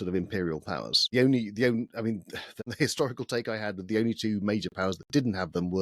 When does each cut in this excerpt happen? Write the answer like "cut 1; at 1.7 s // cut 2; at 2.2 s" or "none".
cut 1; at 1.0 s // cut 2; at 2.4 s

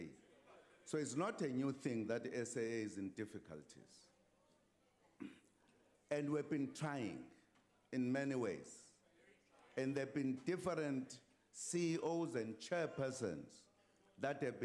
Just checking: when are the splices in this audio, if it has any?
none

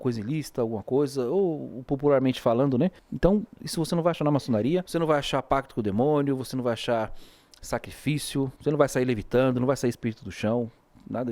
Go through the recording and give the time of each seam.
cut 1; at 3.1 s // cut 2; at 4.9 s // cut 3; at 8.5 s

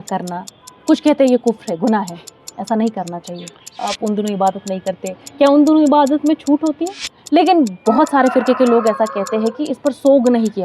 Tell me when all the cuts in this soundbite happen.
cut 1; at 3.8 s // cut 2; at 6.9 s

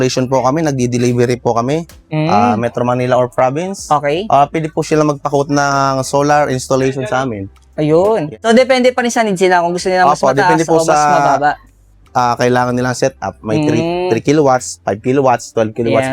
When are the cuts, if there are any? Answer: cut 1; at 8.3 s

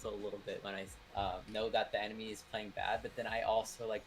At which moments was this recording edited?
cut 1; at 1.0 s

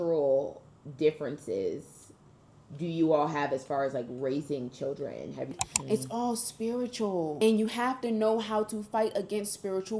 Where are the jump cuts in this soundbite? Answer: cut 1; at 5.5 s // cut 2; at 7.4 s

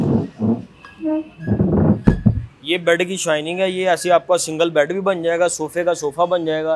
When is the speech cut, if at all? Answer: none

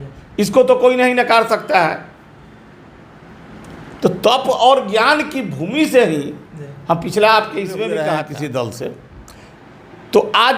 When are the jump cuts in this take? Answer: cut 1; at 8.1 s

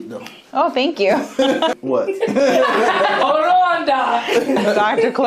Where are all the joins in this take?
cut 1; at 1.7 s // cut 2; at 3.2 s // cut 3; at 4.6 s

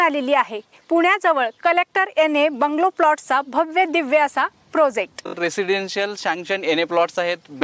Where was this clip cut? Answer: cut 1; at 5.4 s

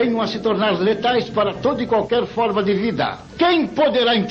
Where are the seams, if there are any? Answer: cut 1; at 3.2 s

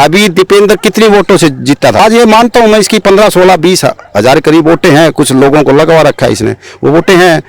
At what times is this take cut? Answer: cut 1; at 2.0 s

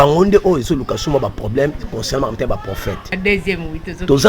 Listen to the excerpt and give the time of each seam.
cut 1; at 3.2 s

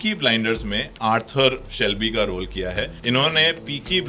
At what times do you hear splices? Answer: cut 1; at 3.0 s

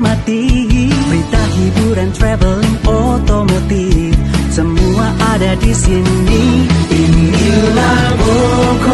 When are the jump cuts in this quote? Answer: none

